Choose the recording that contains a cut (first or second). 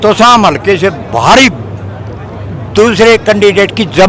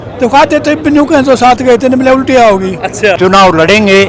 second